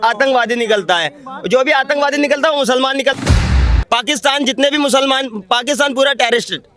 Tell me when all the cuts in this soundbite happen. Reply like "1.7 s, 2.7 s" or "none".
3.4 s